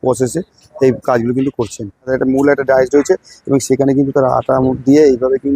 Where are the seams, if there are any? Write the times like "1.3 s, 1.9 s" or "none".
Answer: 2.1 s